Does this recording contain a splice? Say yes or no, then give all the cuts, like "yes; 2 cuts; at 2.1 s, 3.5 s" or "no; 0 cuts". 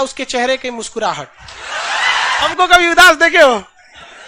yes; 1 cut; at 2.5 s